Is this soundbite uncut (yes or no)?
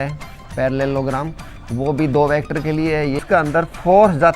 no